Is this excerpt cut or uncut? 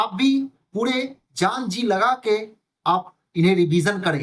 uncut